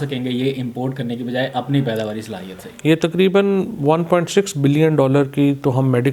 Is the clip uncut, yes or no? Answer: yes